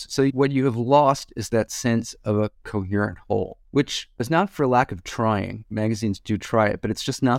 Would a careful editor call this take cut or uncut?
uncut